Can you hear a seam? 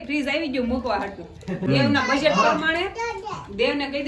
yes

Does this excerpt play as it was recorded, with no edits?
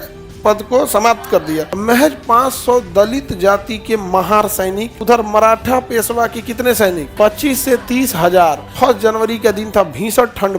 no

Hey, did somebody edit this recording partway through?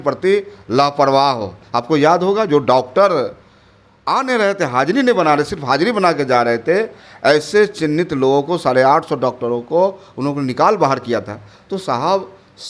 no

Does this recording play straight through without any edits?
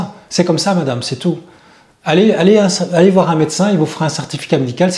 yes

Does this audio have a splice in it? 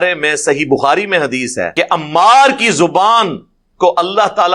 yes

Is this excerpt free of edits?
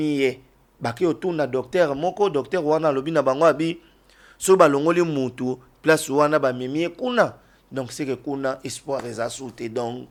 yes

